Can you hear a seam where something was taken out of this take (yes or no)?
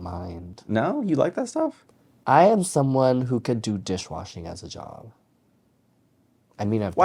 no